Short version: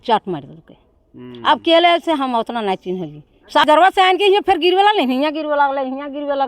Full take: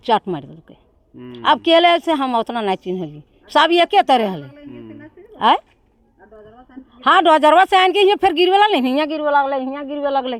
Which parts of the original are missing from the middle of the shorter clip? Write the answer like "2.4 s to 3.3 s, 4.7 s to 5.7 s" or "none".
3.6 s to 7.4 s